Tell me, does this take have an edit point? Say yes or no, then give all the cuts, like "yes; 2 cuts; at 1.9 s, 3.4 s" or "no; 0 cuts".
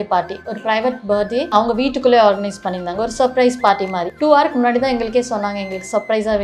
yes; 2 cuts; at 1.5 s, 4.0 s